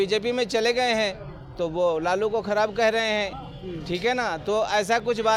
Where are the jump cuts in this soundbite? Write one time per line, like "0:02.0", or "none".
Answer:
none